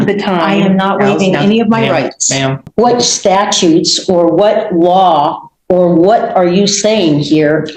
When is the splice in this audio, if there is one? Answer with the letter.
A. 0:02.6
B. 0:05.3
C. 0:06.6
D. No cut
A